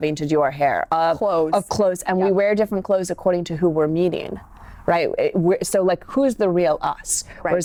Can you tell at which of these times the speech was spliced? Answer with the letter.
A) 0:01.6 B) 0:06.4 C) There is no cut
C